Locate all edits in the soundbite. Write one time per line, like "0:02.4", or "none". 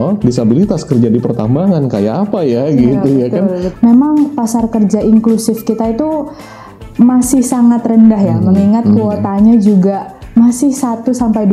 0:03.7